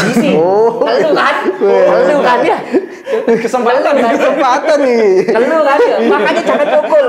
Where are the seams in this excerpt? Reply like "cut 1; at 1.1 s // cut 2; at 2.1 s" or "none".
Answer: none